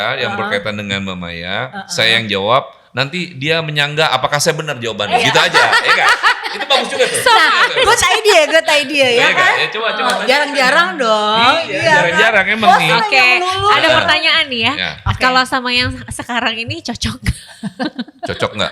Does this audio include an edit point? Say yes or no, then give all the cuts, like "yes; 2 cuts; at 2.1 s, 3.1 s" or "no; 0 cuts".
no; 0 cuts